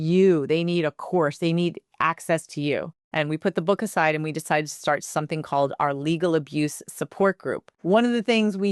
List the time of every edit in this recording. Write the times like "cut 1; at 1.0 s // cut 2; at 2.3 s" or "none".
cut 1; at 3.0 s // cut 2; at 7.7 s